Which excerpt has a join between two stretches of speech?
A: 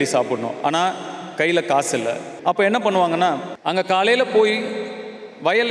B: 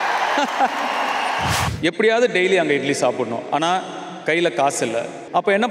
B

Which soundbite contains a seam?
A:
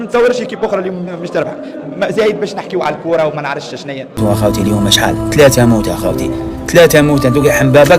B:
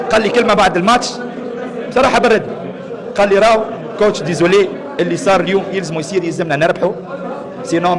A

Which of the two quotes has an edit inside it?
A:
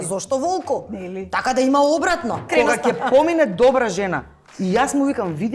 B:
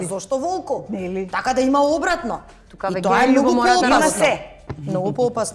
A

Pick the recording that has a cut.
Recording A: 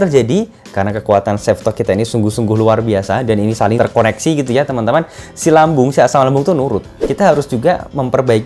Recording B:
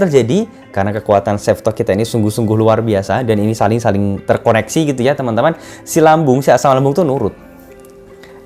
A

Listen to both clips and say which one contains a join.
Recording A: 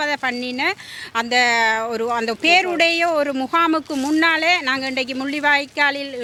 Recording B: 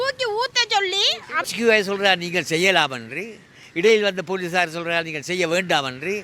B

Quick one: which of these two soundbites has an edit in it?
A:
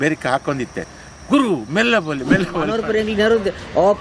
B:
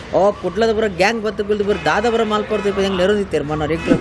A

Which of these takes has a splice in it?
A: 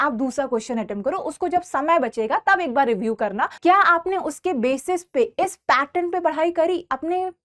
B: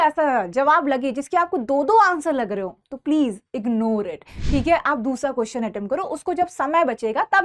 A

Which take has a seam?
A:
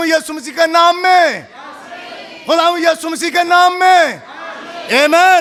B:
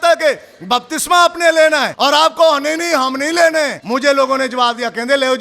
B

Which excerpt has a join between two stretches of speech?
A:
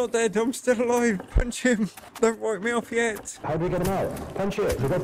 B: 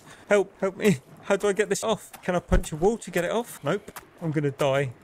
B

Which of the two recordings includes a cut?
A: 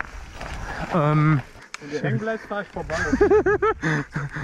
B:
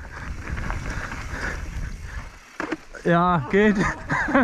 A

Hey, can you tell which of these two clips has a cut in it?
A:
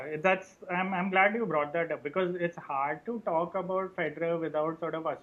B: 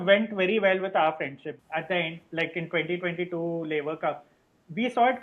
B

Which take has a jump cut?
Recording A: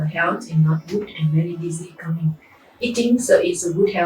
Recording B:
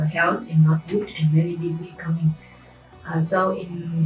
A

